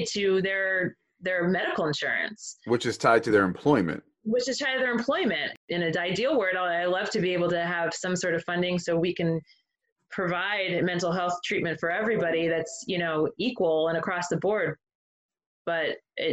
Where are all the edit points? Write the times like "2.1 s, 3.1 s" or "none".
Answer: 5.5 s